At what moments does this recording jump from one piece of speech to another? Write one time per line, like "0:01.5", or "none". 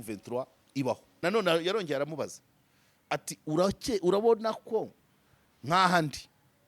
0:01.2